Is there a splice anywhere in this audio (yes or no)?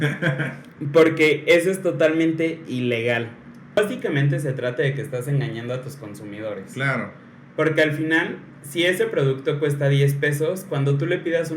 yes